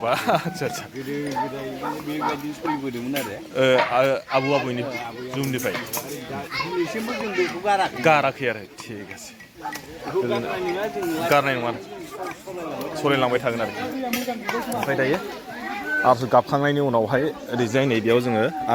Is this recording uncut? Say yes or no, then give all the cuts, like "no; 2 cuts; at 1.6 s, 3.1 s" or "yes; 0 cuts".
yes; 0 cuts